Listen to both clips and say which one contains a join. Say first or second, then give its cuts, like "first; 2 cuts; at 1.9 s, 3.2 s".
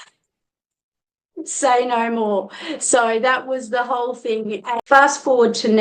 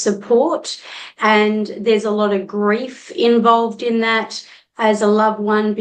first; 1 cut; at 4.7 s